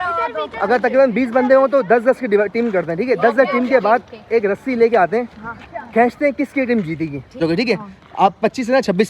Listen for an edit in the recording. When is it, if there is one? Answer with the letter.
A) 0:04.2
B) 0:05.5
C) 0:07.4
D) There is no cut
C